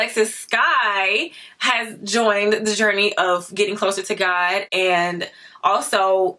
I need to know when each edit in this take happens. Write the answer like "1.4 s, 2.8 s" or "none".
none